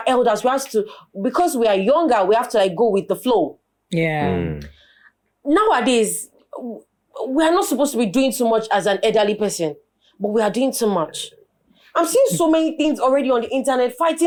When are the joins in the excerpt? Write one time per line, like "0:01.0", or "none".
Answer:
none